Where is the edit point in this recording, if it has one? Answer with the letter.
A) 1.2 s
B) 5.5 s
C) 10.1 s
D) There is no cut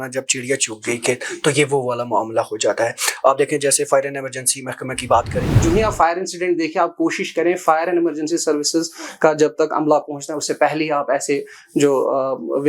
B